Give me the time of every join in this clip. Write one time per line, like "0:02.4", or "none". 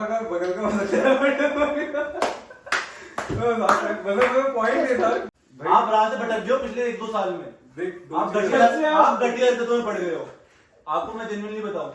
0:05.3